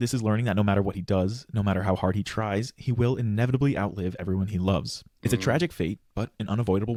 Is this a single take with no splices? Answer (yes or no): yes